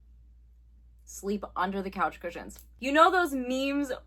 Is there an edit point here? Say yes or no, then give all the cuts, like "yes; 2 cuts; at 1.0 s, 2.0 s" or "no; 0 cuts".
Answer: no; 0 cuts